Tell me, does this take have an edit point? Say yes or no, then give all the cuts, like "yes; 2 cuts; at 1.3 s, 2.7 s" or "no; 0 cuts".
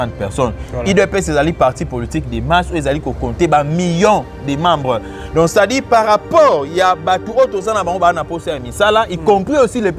no; 0 cuts